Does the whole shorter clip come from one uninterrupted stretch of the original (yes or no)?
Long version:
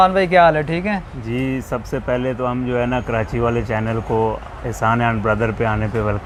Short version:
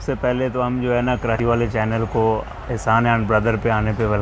no